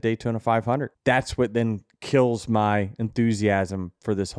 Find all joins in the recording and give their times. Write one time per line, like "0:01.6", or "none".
0:00.9